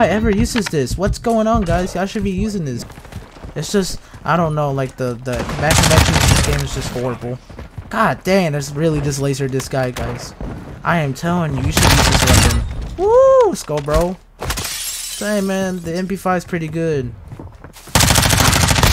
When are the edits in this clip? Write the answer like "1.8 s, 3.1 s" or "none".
2.9 s